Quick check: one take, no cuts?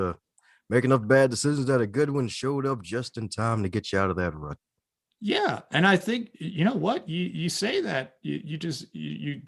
yes; 0 cuts

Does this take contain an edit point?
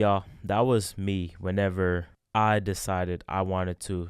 yes; 1 cut; at 2.2 s

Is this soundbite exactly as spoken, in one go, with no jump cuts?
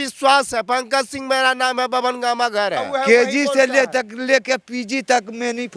no; 1 cut; at 2.8 s

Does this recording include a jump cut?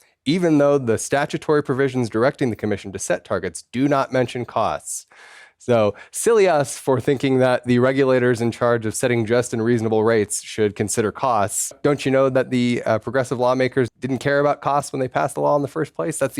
yes; 2 cuts; at 11.8 s, 14.0 s

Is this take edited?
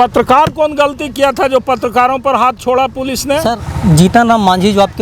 yes; 1 cut; at 3.6 s

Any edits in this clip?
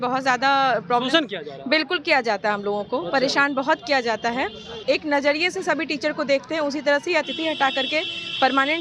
yes; 1 cut; at 4.7 s

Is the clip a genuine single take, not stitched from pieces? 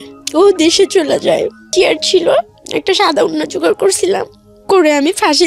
no; 1 cut; at 1.7 s

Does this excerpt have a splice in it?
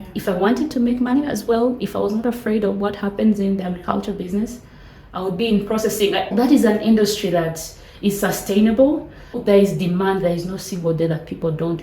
yes; 2 cuts; at 6.3 s, 9.4 s

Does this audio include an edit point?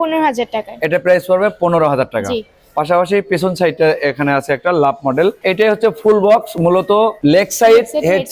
no; 0 cuts

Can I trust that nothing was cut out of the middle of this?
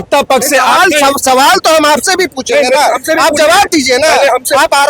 yes; 0 cuts

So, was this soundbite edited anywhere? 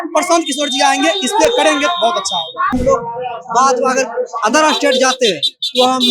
yes; 1 cut; at 2.7 s

